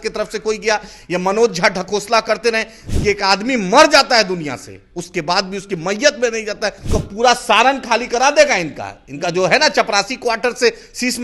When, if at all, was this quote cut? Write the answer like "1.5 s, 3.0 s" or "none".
2.8 s, 6.8 s